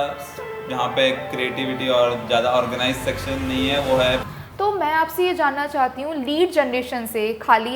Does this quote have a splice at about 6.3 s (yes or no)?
no